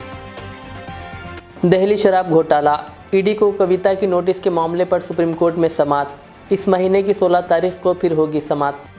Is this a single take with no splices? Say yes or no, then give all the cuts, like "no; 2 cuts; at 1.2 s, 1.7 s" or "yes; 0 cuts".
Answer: yes; 0 cuts